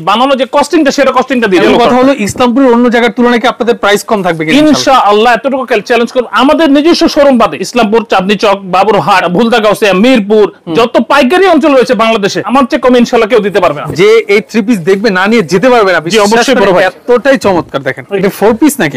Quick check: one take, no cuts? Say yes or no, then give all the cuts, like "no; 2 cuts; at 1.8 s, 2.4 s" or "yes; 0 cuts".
no; 6 cuts; at 1.6 s, 7.6 s, 9.3 s, 12.4 s, 13.9 s, 18.0 s